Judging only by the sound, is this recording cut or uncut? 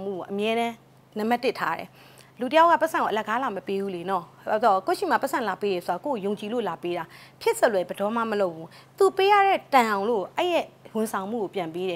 uncut